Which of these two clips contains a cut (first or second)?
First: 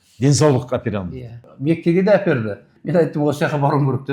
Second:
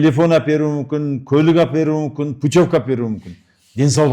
first